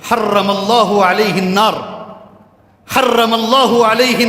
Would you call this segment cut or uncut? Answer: uncut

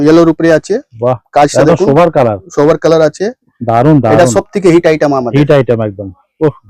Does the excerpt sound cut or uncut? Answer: uncut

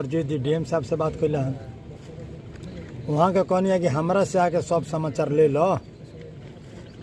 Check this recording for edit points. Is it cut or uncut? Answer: uncut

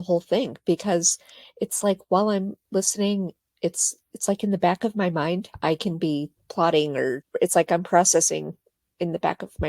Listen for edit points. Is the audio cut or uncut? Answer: cut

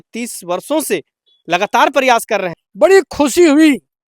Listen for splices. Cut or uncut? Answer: cut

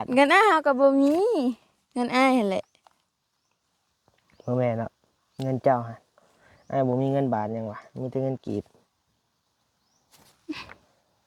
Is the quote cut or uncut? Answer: uncut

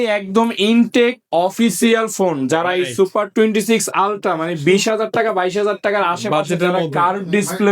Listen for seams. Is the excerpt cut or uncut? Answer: uncut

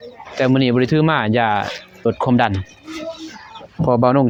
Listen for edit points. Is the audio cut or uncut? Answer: uncut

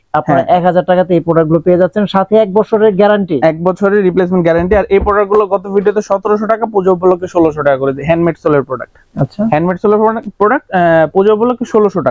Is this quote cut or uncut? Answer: uncut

